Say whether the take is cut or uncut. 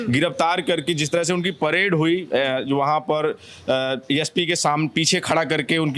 uncut